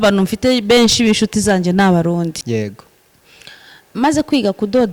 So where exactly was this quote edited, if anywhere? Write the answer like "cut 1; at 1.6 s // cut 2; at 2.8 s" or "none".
cut 1; at 2.4 s